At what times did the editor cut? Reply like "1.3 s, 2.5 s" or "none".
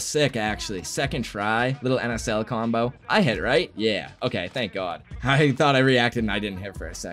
none